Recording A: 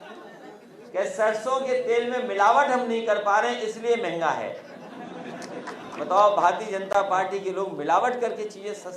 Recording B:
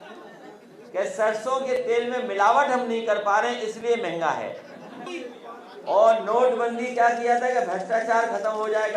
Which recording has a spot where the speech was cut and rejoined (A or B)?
B